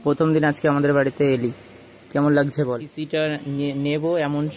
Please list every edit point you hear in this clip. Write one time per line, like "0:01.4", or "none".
0:02.9